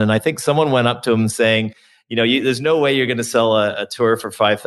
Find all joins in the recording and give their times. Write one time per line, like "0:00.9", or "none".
none